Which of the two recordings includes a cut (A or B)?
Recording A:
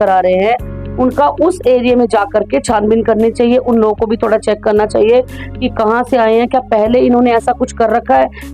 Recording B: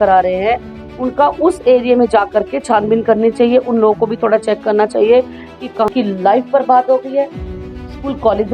B